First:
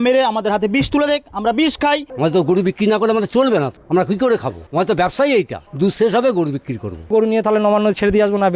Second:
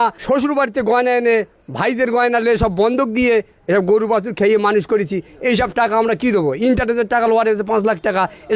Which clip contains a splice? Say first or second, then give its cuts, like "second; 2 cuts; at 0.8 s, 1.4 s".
first; 5 cuts; at 2.1 s, 3.8 s, 4.6 s, 5.6 s, 7.1 s